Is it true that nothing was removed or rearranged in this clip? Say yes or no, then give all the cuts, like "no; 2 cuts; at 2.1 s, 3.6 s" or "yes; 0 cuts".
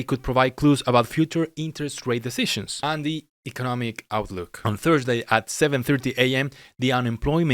yes; 0 cuts